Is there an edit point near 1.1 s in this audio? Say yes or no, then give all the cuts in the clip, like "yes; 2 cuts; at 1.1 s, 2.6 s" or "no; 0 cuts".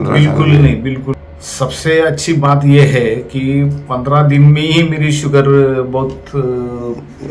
yes; 1 cut; at 1.1 s